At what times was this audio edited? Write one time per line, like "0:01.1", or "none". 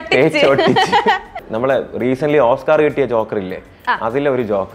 0:01.3